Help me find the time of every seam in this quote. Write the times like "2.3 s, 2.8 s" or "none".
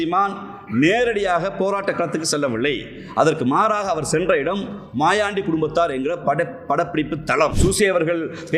7.5 s